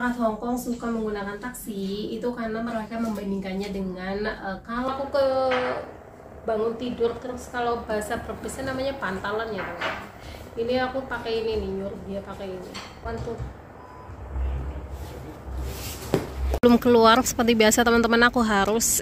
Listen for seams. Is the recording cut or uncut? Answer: cut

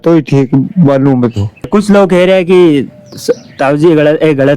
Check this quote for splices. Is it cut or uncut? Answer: cut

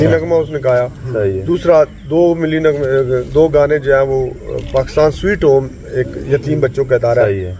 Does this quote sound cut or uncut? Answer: uncut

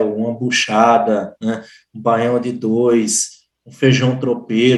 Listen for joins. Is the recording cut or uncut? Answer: uncut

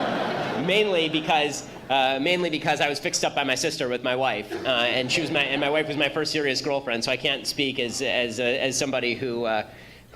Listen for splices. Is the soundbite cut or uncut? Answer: cut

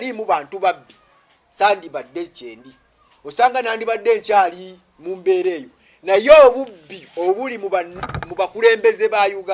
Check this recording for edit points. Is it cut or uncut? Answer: uncut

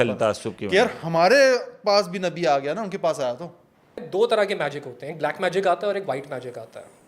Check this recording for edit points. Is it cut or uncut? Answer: cut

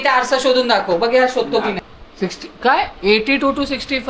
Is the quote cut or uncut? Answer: cut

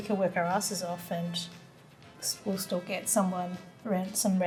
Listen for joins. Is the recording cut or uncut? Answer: uncut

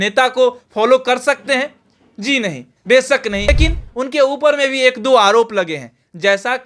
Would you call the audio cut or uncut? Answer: cut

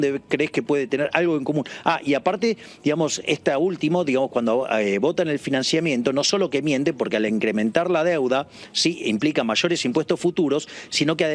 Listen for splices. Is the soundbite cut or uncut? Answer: uncut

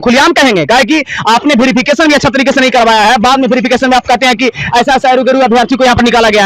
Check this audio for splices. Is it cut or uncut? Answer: uncut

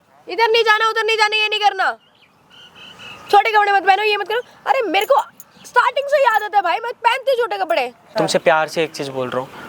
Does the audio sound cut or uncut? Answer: cut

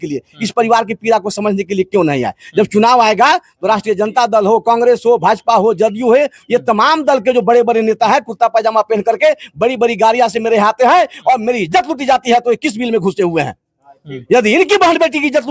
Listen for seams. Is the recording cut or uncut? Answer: uncut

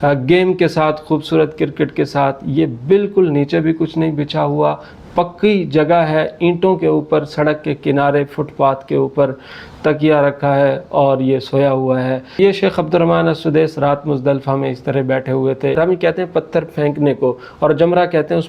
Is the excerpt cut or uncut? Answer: cut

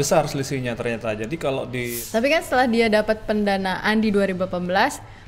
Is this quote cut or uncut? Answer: cut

